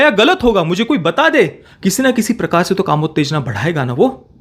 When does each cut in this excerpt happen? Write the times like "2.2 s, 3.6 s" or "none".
1.7 s